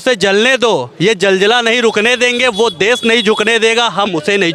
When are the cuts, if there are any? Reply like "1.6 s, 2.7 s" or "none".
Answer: none